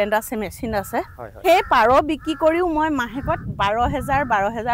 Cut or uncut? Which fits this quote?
cut